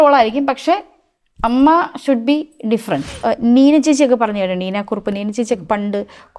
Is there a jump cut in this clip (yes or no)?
yes